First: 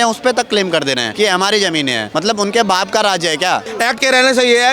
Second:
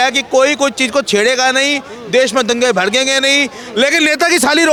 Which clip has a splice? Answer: first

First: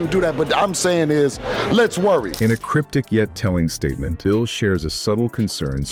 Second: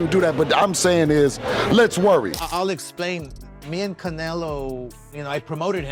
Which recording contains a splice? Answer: second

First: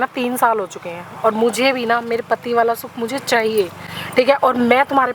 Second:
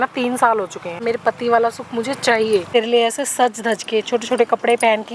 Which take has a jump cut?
second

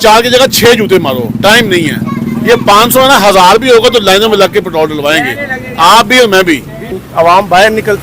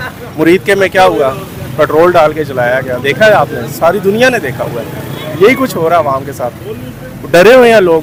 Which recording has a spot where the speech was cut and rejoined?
first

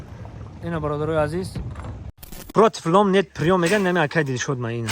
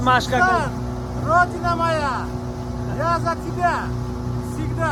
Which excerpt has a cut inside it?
first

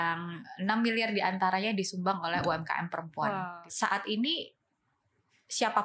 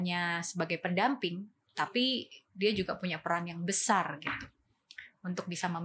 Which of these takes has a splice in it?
first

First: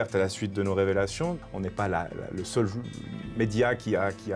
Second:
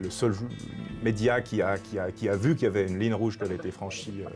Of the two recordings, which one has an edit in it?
first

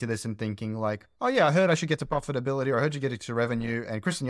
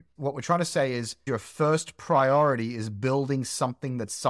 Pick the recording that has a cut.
second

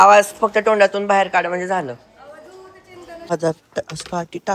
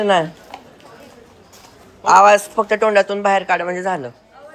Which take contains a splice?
first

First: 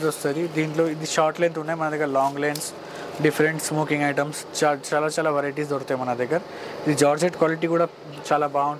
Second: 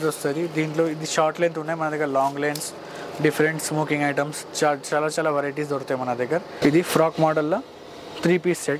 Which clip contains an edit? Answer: second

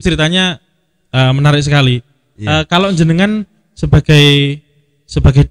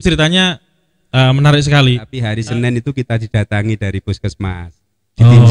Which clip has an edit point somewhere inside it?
second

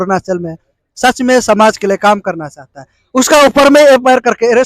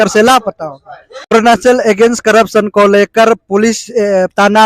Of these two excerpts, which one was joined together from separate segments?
second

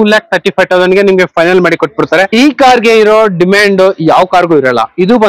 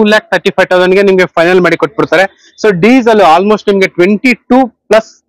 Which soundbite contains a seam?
first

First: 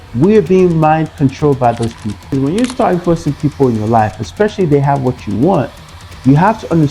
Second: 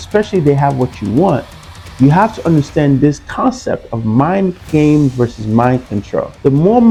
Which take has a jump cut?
first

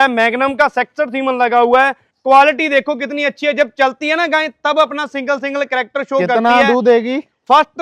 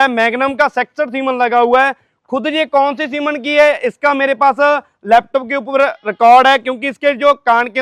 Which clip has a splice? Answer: first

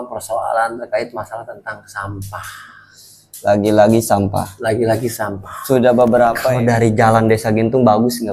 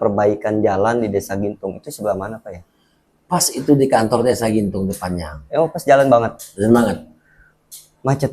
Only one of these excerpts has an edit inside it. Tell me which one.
first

